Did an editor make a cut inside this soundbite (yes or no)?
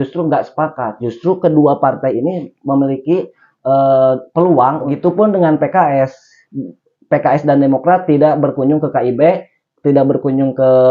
yes